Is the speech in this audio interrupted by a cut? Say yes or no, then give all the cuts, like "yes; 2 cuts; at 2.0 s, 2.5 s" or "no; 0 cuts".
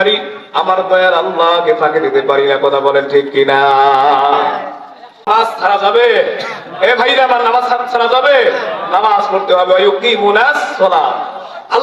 yes; 1 cut; at 5.3 s